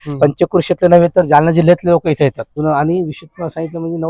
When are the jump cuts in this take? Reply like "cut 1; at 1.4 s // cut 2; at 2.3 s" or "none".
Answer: cut 1; at 2.5 s